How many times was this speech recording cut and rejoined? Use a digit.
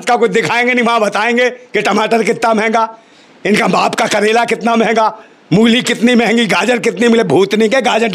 0